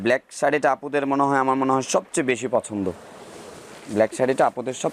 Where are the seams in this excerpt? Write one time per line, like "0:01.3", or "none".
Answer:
none